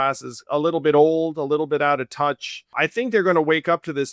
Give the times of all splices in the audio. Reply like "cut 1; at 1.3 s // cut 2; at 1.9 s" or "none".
cut 1; at 2.7 s